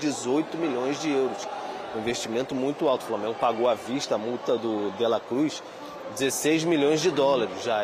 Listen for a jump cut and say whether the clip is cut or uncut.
uncut